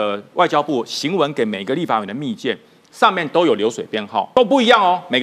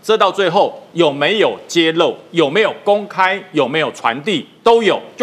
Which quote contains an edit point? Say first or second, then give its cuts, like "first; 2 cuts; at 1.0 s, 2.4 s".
first; 1 cut; at 4.3 s